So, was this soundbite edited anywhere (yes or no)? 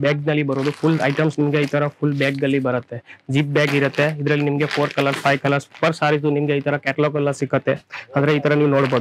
no